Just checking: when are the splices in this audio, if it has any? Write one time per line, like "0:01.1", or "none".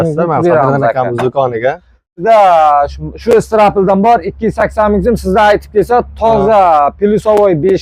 0:02.2